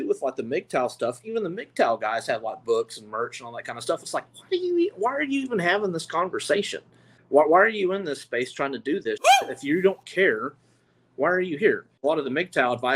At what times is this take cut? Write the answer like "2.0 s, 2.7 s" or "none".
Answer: 7.1 s, 12.0 s